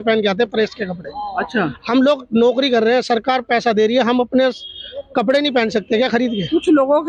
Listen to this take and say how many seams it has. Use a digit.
0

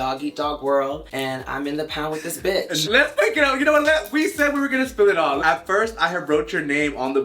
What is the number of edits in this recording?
2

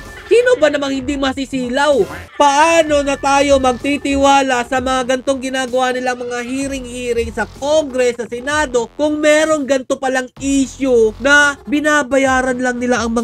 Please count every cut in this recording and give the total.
1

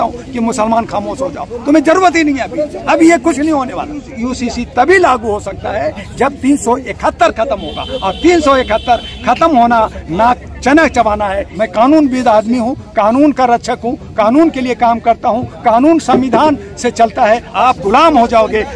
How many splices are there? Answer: 3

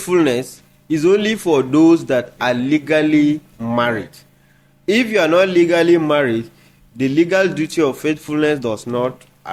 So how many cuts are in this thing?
0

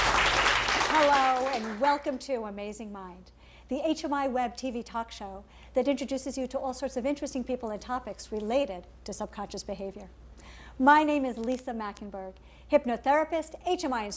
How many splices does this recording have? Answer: 1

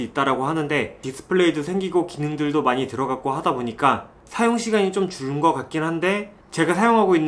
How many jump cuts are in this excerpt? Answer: 1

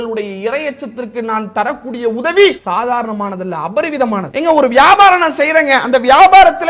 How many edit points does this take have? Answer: 2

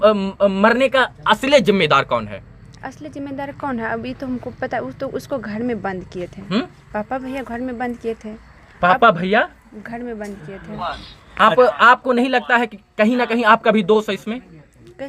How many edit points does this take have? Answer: 0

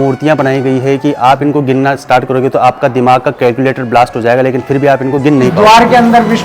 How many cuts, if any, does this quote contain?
1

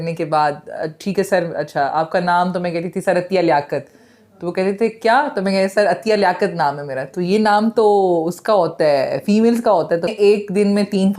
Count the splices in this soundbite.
1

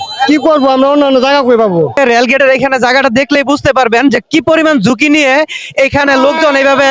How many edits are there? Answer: 1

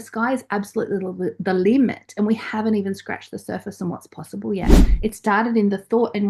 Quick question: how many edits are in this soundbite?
1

